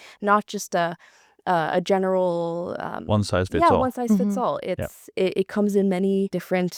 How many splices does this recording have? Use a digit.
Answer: 0